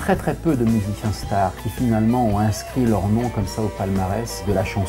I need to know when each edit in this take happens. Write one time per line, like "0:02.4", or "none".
none